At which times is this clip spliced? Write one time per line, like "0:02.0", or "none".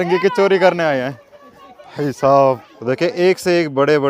0:02.7